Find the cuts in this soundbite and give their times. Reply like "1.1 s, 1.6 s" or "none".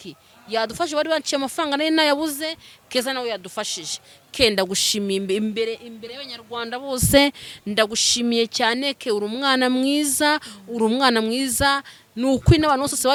none